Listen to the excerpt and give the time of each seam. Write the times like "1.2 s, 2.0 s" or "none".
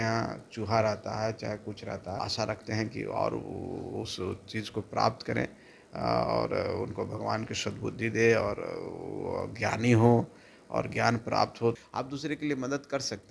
2.2 s, 11.8 s